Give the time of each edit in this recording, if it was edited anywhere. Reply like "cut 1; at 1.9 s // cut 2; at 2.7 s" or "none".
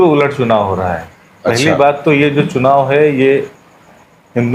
none